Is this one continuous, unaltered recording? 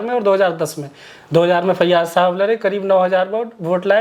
yes; 0 cuts

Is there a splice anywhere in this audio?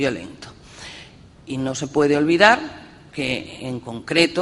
yes; 1 cut; at 1.1 s

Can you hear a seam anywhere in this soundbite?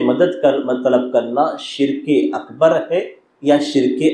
yes; 1 cut; at 3.2 s

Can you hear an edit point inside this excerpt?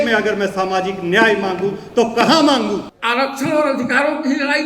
yes; 1 cut; at 2.9 s

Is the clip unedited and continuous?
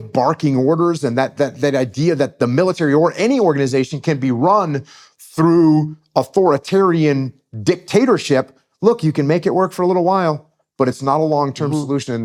yes; 0 cuts

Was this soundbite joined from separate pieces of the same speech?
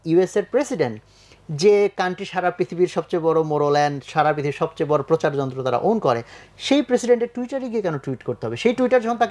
no; 0 cuts

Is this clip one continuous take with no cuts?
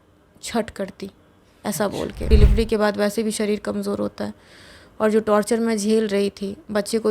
no; 1 cut; at 2.3 s

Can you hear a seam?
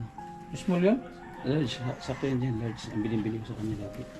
no; 0 cuts

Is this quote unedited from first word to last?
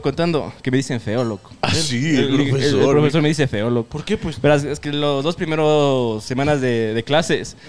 yes; 0 cuts

